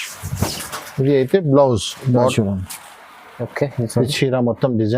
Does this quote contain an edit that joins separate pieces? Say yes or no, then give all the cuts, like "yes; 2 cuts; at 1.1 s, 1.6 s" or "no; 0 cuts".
yes; 1 cut; at 2.3 s